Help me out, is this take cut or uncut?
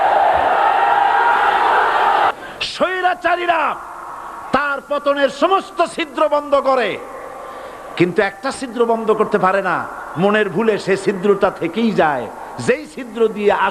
cut